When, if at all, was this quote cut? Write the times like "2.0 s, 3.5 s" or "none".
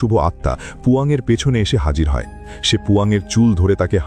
none

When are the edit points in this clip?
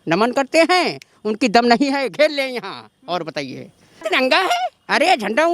4.0 s

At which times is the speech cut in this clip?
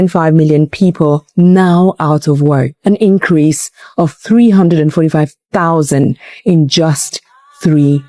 none

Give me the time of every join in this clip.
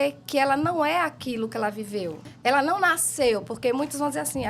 2.3 s

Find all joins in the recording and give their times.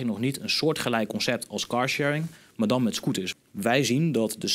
3.3 s

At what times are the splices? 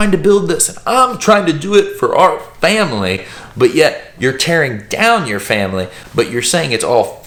none

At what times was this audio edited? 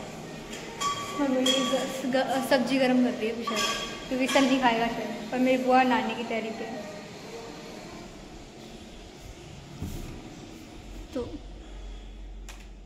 none

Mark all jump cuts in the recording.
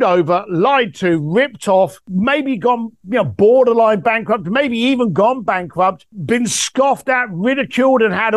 2.0 s, 6.1 s

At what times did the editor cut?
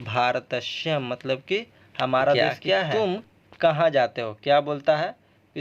2.9 s

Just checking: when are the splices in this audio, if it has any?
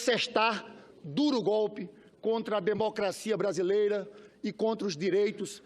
2.7 s

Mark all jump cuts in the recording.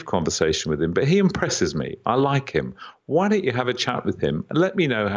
none

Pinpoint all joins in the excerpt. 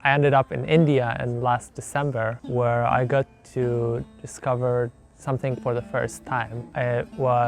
2.4 s, 6.6 s

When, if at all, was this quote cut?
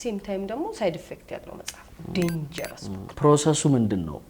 3.1 s

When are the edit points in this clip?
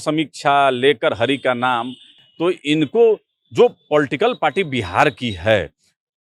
none

